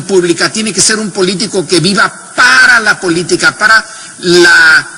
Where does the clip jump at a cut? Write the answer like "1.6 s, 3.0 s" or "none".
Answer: 1.2 s